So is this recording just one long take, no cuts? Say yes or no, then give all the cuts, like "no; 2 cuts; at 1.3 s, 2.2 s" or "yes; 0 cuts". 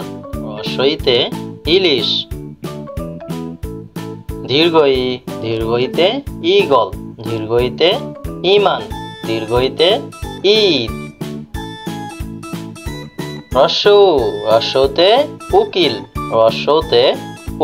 no; 4 cuts; at 2.0 s, 4.5 s, 11.1 s, 13.5 s